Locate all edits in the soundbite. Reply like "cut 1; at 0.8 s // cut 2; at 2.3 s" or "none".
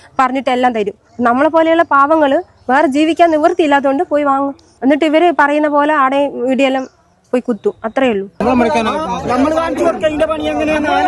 cut 1; at 8.4 s